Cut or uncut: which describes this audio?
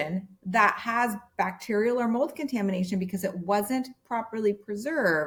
uncut